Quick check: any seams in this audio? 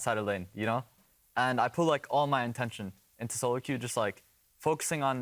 yes; 1 cut; at 1.0 s

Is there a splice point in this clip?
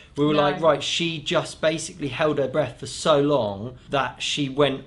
yes; 1 cut; at 3.7 s

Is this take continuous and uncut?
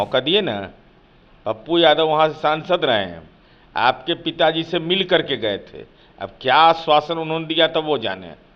yes; 0 cuts

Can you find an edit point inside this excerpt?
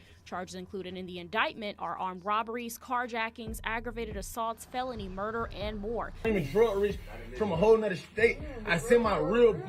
yes; 1 cut; at 6.2 s

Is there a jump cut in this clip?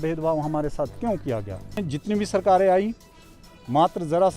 yes; 1 cut; at 1.8 s

